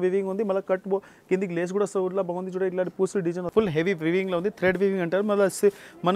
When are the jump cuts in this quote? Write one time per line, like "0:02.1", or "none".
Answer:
0:03.5